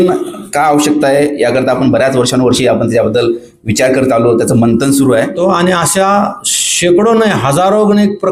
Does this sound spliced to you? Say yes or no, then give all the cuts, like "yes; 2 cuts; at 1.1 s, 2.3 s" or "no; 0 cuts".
yes; 1 cut; at 5.4 s